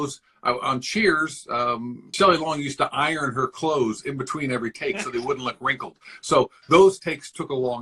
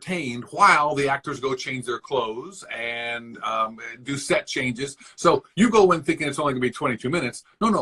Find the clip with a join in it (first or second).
first